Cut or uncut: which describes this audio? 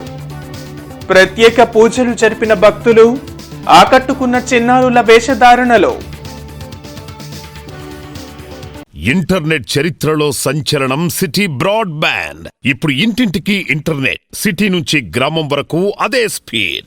cut